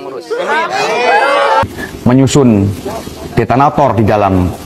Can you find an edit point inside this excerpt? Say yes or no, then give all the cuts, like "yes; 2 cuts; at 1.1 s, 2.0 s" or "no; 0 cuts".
yes; 1 cut; at 1.7 s